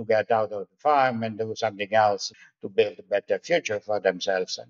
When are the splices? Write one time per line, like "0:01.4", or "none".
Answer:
0:02.3

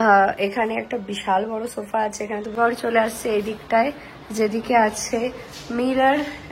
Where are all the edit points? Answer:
0:02.5

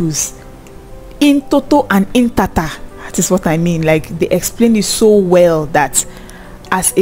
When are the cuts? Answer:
none

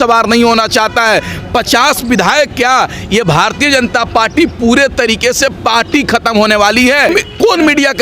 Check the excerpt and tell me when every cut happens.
0:07.1

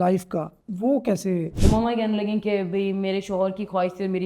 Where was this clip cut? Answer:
0:01.5

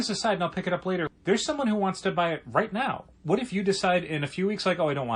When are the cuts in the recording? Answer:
0:01.1

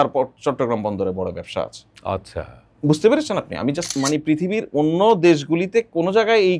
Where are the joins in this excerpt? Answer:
0:04.0

